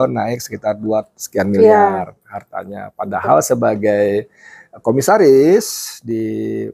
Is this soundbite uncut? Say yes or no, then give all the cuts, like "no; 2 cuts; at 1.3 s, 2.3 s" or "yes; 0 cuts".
yes; 0 cuts